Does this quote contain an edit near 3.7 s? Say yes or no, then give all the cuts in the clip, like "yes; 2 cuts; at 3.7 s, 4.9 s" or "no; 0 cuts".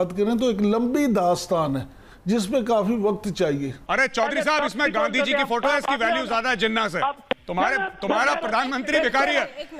yes; 2 cuts; at 3.7 s, 7.2 s